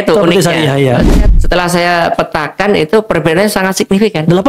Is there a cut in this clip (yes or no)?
yes